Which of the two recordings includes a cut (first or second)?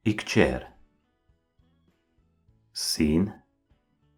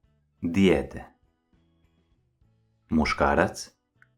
second